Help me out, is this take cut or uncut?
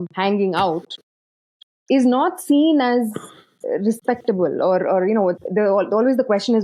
uncut